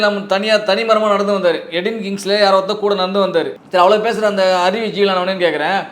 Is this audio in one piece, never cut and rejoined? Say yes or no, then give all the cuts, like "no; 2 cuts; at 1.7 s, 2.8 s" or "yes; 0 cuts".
no; 1 cut; at 3.6 s